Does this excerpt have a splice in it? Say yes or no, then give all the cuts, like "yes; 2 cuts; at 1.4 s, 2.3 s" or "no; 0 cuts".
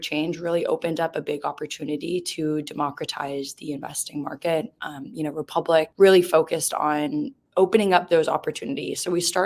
no; 0 cuts